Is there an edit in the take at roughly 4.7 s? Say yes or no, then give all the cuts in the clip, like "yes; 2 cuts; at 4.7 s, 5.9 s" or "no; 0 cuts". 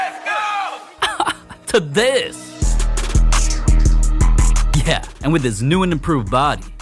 yes; 1 cut; at 4.7 s